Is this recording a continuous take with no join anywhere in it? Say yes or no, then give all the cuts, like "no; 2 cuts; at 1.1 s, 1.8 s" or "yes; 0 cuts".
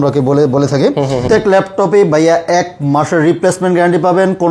no; 1 cut; at 1.2 s